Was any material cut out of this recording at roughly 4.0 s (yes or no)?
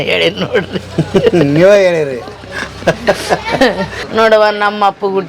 yes